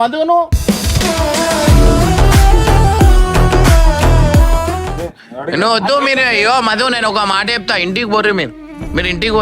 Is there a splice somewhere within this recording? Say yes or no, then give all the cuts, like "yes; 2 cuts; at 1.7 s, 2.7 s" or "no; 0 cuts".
yes; 1 cut; at 4.9 s